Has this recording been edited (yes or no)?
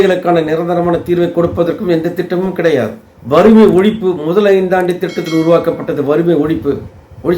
yes